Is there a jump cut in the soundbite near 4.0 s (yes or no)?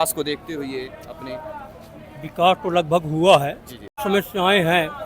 yes